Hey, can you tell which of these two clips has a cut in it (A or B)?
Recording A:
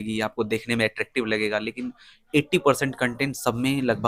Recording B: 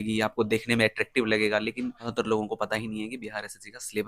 B